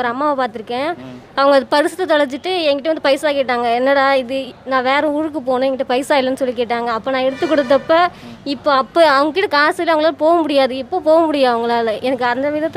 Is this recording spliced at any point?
no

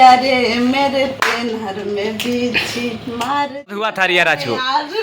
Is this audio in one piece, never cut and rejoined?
no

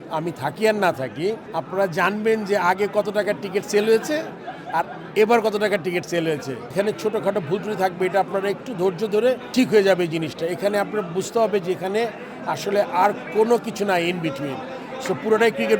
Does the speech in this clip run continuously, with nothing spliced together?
no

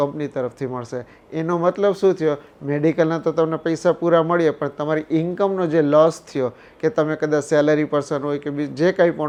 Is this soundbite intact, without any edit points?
yes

